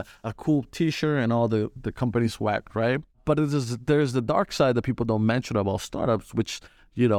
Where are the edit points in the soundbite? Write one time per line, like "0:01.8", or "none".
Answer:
none